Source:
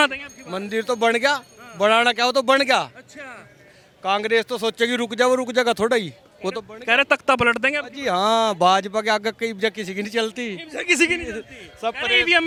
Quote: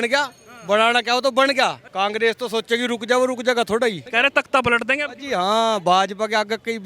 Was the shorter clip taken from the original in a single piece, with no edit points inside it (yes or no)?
no